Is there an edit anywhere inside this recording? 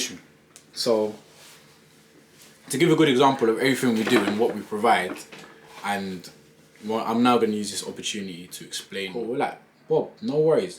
yes; 1 cut; at 9.1 s

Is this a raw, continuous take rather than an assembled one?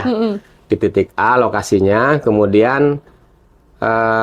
yes; 0 cuts

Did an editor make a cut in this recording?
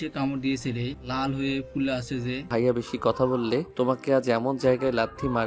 yes; 3 cuts; at 1.0 s, 2.4 s, 3.7 s

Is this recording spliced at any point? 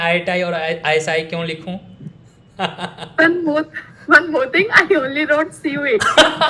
no; 0 cuts

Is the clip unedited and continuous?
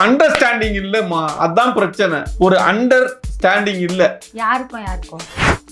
yes; 0 cuts

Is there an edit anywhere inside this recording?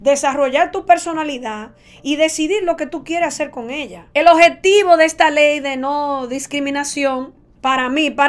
yes; 1 cut; at 4.0 s

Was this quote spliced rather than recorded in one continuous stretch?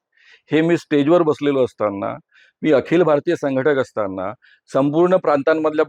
no; 0 cuts

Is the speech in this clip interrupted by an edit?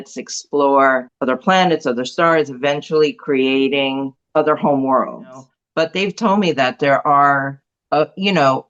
yes; 3 cuts; at 1.1 s, 4.1 s, 5.6 s

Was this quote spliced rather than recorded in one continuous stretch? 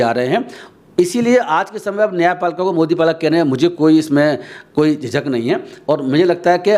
no; 0 cuts

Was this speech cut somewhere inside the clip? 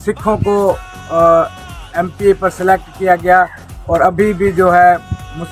no; 0 cuts

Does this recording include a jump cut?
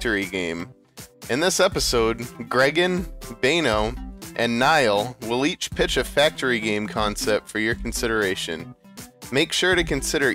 no; 0 cuts

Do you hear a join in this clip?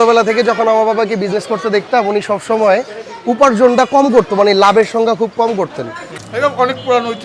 yes; 1 cut; at 6.1 s

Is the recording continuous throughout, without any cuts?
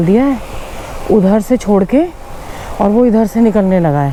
yes; 0 cuts

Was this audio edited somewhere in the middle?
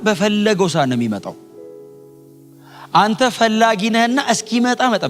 no; 0 cuts

